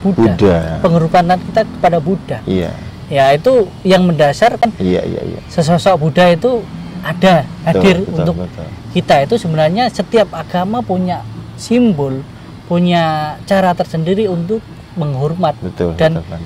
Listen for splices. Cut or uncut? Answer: cut